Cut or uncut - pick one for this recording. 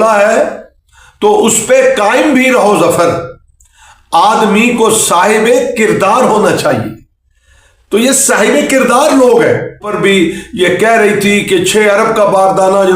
cut